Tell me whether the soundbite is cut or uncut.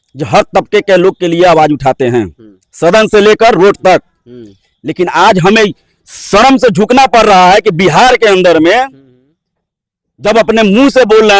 uncut